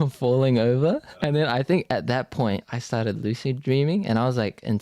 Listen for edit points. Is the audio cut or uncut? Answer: cut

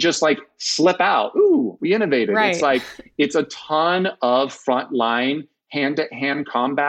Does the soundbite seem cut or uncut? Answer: uncut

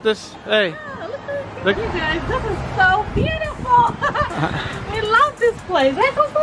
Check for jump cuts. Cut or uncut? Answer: cut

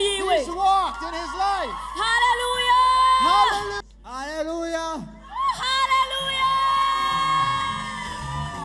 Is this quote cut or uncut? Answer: cut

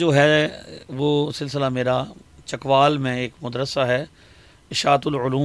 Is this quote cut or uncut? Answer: uncut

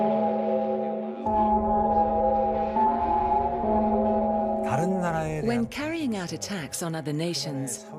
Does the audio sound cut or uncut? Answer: cut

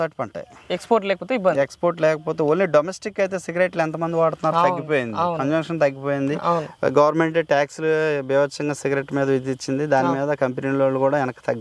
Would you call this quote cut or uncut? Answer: uncut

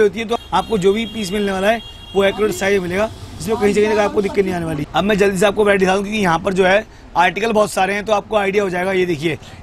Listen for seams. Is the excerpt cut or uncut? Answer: cut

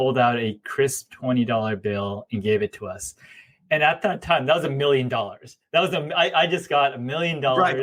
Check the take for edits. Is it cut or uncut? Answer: uncut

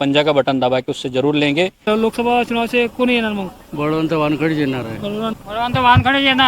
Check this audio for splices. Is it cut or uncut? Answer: cut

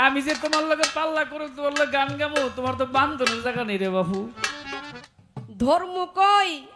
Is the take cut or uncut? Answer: cut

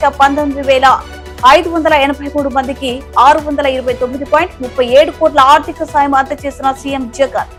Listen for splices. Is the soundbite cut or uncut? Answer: uncut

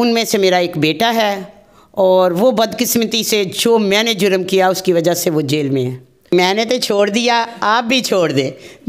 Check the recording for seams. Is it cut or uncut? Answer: cut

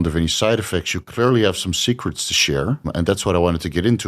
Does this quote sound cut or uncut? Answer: cut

